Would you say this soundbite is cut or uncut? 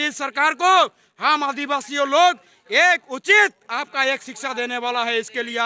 uncut